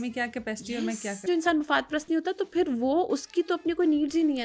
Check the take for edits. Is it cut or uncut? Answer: cut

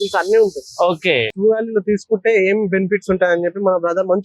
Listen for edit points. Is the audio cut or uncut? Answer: cut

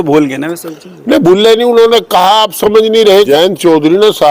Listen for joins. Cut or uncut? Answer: cut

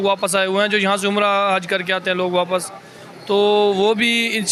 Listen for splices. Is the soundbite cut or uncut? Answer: uncut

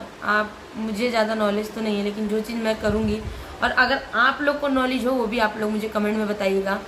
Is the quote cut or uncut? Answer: uncut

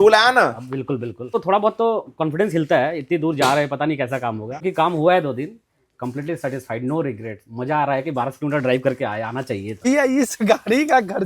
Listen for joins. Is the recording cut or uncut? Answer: cut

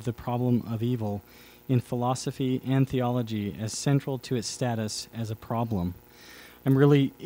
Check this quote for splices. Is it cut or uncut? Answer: uncut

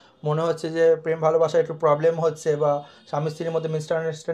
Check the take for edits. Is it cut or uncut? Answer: uncut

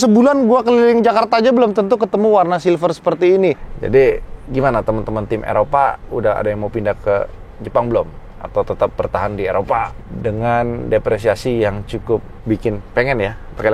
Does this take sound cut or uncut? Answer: cut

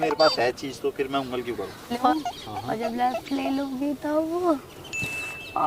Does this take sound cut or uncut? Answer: cut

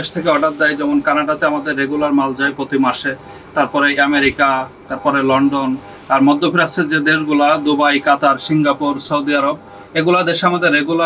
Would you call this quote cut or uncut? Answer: uncut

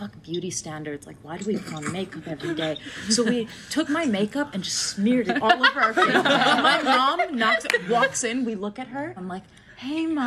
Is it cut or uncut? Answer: cut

